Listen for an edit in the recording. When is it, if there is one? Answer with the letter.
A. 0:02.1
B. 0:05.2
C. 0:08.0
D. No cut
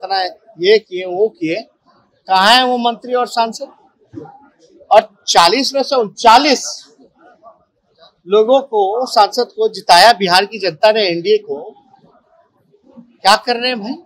D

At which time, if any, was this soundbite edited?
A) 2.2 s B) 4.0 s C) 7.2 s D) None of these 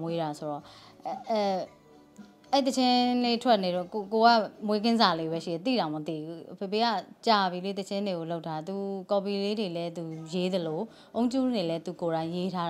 D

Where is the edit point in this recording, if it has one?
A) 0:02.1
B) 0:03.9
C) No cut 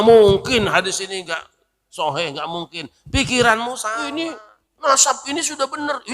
B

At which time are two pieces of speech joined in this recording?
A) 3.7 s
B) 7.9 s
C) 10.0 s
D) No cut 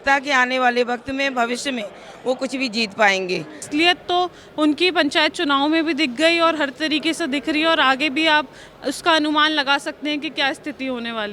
A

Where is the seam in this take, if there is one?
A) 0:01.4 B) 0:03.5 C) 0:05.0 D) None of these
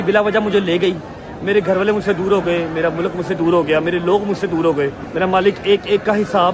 C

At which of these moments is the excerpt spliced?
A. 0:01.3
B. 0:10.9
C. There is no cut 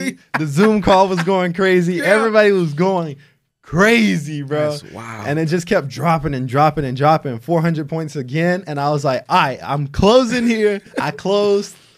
B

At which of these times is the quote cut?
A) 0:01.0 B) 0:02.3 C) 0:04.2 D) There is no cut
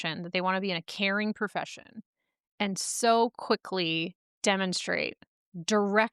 C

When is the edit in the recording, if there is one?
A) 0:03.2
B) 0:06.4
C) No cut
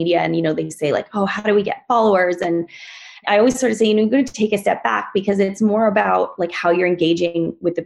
A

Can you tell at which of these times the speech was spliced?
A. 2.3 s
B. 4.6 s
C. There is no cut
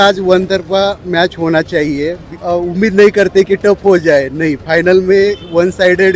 A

